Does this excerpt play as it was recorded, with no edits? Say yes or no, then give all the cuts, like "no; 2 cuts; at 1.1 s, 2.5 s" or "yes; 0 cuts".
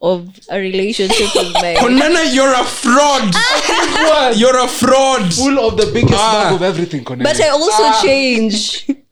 yes; 0 cuts